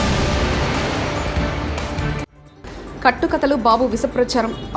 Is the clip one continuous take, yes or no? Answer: no